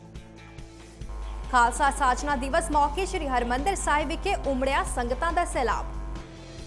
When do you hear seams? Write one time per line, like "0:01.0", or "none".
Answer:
0:01.1